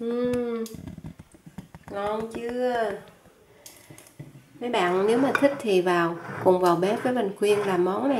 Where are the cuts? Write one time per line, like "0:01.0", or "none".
none